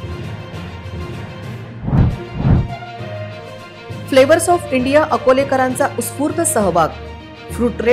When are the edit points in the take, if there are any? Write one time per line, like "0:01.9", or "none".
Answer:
0:00.9